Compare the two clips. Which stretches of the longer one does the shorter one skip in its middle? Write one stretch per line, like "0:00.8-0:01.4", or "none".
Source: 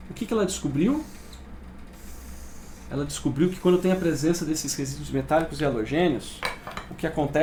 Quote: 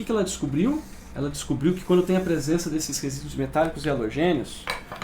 0:01.2-0:02.7